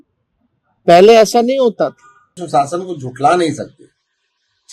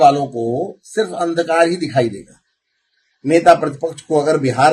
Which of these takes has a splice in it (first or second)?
first